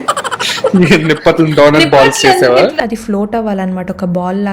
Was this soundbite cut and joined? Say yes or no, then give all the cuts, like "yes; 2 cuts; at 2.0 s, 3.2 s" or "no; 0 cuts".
yes; 1 cut; at 2.8 s